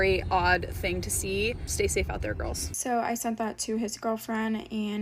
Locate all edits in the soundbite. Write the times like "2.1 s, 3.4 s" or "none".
1.6 s, 2.7 s

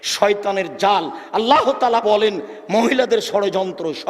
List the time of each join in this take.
none

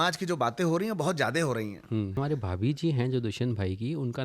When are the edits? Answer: 2.1 s

